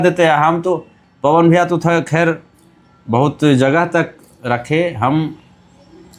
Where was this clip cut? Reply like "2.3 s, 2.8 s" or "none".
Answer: none